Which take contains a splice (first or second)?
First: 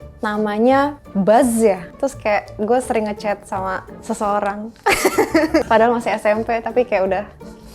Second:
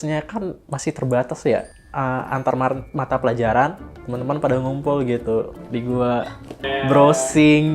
first